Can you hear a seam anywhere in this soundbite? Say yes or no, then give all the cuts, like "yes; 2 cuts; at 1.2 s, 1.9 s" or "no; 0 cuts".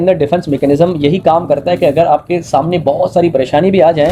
no; 0 cuts